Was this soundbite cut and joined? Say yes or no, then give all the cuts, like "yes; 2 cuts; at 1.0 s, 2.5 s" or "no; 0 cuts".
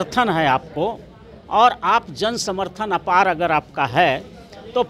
no; 0 cuts